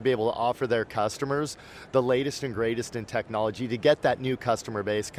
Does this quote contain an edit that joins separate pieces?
no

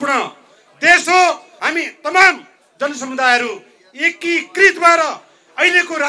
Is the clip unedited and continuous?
no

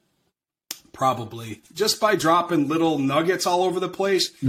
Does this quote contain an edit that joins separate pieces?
yes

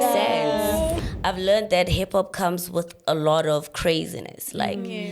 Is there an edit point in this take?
yes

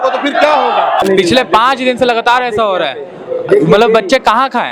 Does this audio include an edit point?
yes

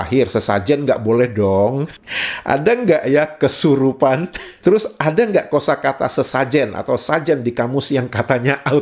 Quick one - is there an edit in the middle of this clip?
yes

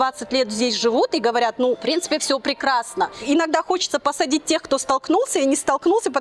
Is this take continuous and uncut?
no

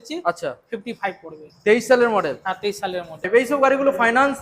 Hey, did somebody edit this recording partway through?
yes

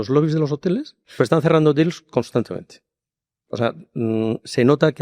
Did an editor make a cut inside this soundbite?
yes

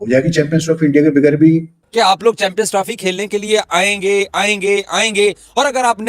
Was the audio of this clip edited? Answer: yes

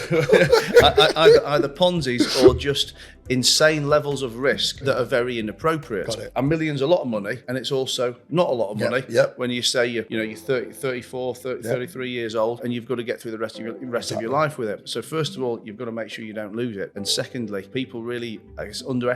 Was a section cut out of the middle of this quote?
yes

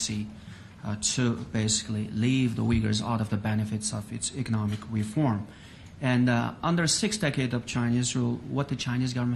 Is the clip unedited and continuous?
no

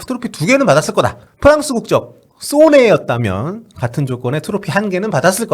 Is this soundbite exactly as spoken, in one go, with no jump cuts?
no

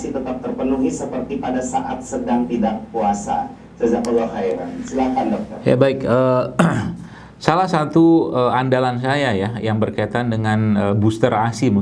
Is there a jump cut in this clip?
no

